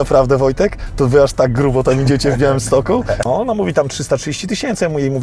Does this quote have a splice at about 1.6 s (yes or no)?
no